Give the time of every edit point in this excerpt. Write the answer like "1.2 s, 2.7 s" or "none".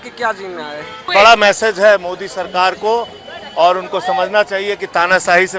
1.1 s